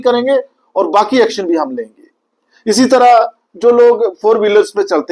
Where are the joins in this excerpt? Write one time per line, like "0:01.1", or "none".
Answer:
none